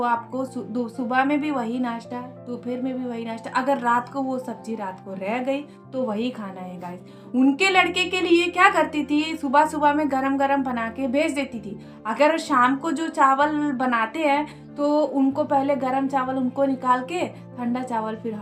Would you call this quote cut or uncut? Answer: uncut